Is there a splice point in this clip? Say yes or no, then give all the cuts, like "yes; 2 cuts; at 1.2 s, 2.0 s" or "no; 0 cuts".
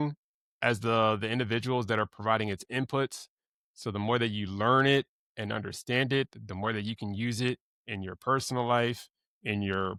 no; 0 cuts